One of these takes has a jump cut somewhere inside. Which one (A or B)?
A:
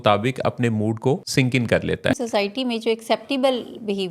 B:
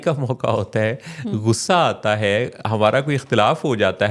A